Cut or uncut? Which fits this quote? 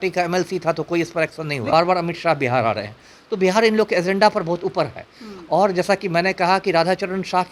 cut